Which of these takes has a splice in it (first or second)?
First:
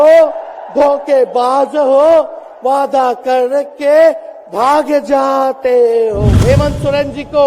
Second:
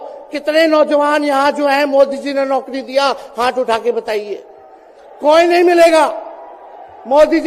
first